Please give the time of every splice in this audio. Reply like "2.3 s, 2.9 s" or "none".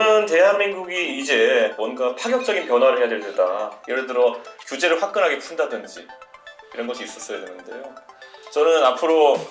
1.7 s, 3.8 s